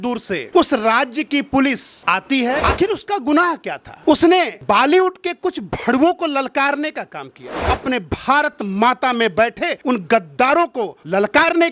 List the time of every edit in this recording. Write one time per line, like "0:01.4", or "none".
0:02.6
0:07.6